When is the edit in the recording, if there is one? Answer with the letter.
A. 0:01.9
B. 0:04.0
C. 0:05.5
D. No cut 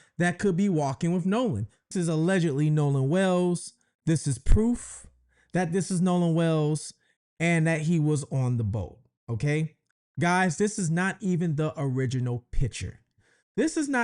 A